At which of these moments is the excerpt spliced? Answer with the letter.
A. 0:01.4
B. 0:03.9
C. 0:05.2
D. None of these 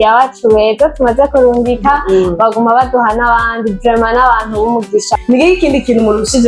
C